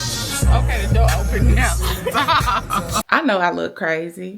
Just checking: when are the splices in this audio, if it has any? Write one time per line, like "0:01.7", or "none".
0:03.0